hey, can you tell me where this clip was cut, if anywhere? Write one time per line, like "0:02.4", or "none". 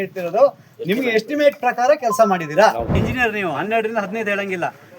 0:03.1